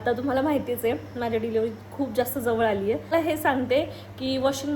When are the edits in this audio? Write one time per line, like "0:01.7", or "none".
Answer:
0:03.1